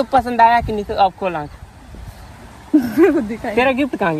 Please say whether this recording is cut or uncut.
uncut